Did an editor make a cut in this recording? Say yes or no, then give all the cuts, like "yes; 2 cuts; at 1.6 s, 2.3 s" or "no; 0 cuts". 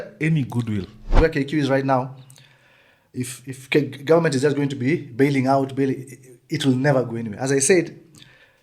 yes; 1 cut; at 1.0 s